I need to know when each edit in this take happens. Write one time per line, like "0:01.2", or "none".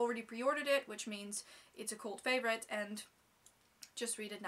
none